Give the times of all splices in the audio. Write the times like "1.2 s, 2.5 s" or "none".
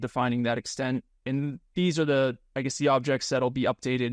1.1 s, 2.5 s